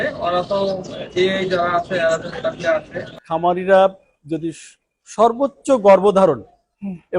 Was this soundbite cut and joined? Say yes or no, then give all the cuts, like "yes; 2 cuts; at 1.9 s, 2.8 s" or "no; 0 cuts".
yes; 1 cut; at 3.2 s